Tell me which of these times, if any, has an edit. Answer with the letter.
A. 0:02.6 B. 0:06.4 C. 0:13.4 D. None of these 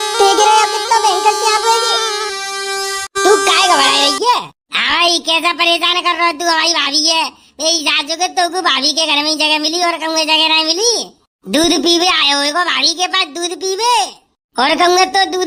D